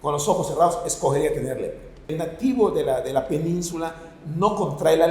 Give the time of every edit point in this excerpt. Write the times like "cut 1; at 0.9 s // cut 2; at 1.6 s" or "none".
cut 1; at 2.1 s